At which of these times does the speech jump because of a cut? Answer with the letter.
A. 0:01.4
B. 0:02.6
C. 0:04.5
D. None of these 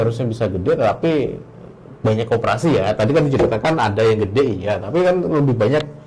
D